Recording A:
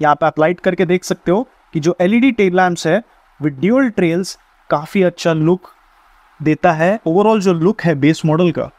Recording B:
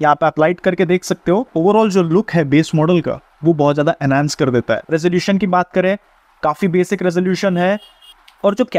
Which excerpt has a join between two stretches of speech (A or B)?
B